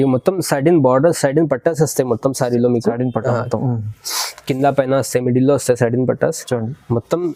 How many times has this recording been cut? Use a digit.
0